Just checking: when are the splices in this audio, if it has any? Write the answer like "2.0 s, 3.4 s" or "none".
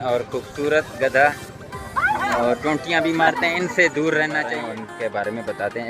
4.6 s